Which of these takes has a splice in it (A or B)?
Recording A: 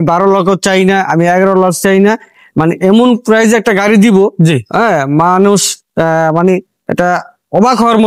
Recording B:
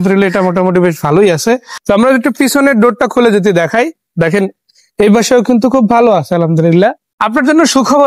B